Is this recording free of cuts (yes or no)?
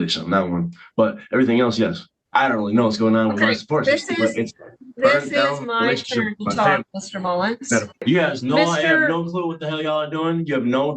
no